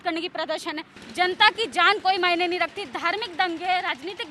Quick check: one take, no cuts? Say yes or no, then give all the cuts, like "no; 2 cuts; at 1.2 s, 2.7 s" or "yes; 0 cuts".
no; 1 cut; at 0.9 s